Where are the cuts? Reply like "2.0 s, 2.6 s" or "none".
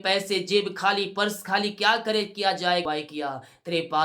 2.8 s